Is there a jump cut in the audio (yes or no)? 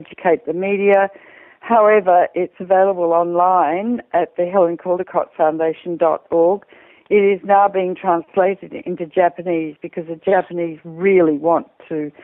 yes